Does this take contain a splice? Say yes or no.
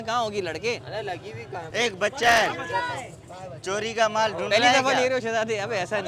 yes